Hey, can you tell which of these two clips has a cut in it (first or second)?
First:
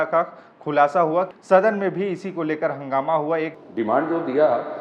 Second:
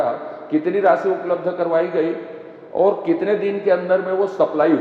first